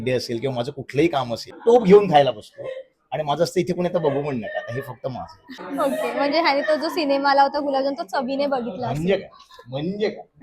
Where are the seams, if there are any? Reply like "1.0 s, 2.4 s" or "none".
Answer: 1.6 s, 5.6 s

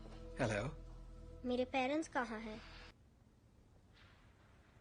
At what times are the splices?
2.9 s

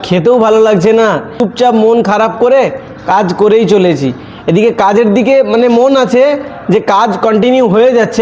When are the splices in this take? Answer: 1.4 s

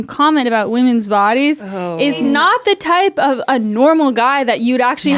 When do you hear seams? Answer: 2.2 s

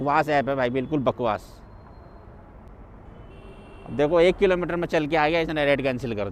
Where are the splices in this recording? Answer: none

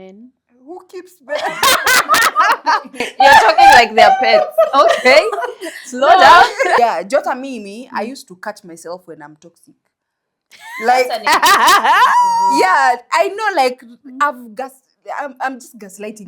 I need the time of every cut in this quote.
6.8 s

